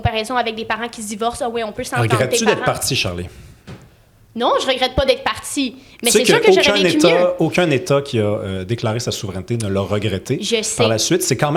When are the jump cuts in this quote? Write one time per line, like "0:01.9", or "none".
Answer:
none